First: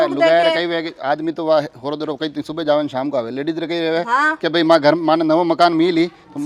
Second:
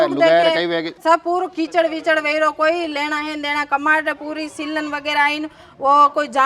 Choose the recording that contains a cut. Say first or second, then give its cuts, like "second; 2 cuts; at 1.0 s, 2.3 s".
second; 1 cut; at 0.9 s